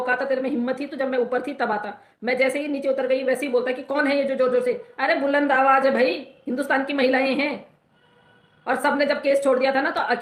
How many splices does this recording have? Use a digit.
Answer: 0